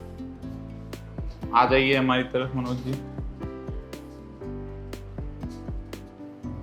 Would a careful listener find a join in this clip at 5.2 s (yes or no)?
no